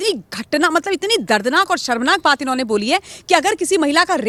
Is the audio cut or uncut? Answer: uncut